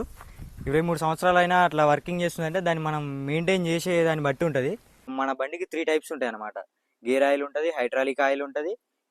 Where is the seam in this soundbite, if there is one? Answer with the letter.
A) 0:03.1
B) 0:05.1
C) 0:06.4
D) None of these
B